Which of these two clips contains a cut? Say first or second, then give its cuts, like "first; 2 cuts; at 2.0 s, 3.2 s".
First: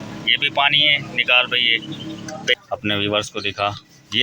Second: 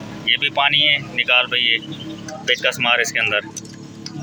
first; 1 cut; at 2.8 s